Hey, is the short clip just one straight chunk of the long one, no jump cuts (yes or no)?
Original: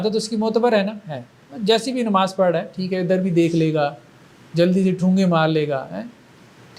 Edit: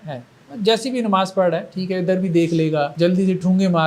no